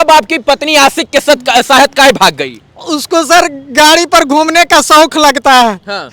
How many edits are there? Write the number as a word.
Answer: zero